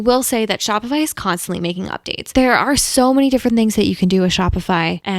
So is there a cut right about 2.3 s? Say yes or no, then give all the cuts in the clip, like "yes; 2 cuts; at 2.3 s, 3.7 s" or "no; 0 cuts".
yes; 1 cut; at 2.3 s